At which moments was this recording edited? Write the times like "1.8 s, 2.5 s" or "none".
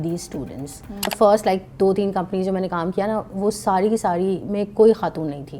1.1 s